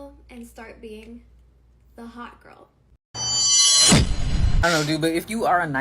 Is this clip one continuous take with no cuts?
no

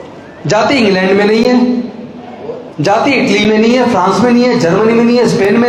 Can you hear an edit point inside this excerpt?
no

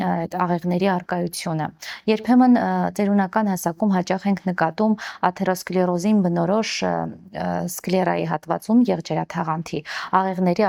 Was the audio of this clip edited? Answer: no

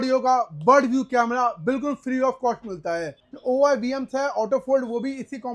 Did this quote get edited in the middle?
yes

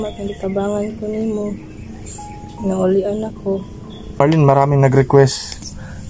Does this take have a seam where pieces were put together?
yes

